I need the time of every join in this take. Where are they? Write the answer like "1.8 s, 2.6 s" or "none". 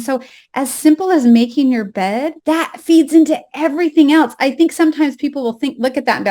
2.3 s